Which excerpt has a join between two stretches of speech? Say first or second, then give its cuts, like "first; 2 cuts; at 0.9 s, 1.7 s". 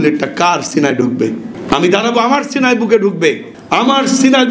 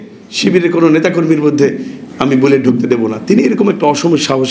first; 2 cuts; at 1.5 s, 3.5 s